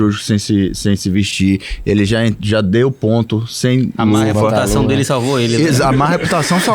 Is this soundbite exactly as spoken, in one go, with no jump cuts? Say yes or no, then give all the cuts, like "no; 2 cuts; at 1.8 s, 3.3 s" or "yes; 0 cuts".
yes; 0 cuts